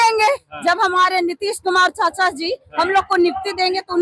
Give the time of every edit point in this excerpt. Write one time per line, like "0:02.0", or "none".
none